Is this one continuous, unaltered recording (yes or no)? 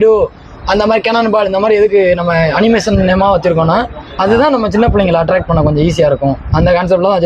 yes